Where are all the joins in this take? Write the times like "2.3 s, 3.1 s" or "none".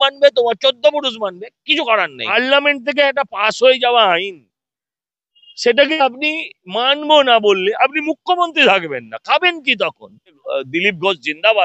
2.3 s, 10.5 s